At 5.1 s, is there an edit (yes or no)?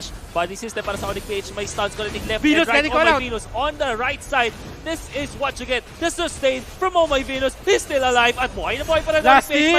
no